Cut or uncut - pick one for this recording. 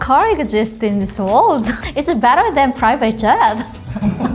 cut